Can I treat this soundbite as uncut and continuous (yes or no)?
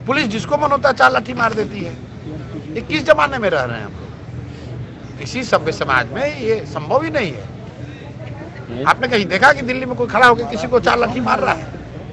yes